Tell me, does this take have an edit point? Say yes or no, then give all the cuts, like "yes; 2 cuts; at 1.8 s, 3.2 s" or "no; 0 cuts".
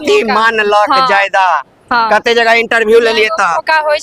no; 0 cuts